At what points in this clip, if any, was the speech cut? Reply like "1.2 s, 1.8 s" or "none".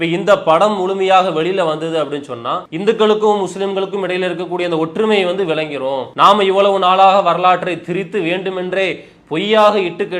2.7 s, 6.1 s